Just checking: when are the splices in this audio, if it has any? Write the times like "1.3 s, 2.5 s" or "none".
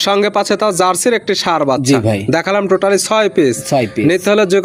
none